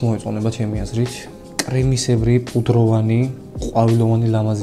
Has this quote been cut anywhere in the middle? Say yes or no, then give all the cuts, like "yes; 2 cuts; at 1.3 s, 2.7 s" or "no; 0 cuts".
no; 0 cuts